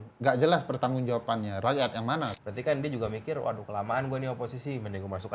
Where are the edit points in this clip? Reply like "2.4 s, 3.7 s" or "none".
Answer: 2.3 s